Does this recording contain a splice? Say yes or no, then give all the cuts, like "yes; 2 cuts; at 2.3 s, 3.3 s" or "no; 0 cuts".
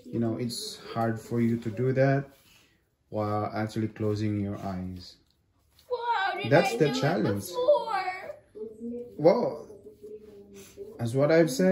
no; 0 cuts